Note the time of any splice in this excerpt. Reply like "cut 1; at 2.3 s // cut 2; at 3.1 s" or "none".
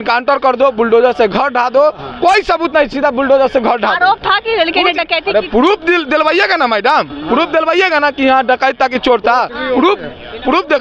none